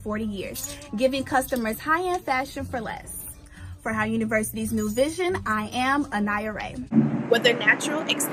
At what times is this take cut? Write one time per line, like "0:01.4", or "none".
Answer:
0:06.9